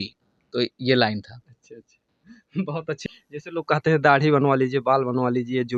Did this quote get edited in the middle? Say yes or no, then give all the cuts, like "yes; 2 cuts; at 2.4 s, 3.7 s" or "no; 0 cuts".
yes; 1 cut; at 3.0 s